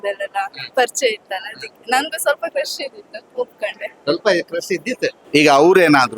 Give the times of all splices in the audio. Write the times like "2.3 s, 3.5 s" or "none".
5.2 s